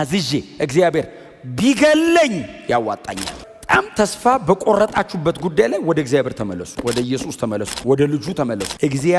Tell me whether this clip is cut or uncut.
cut